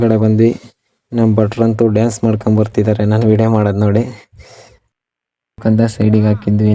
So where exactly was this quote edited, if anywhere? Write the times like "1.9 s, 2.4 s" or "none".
5.6 s